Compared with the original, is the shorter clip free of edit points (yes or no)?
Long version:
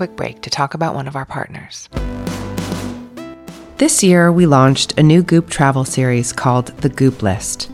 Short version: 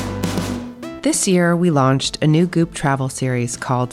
no